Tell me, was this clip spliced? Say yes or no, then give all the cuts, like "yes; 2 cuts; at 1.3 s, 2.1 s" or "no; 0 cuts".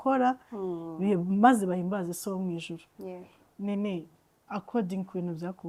no; 0 cuts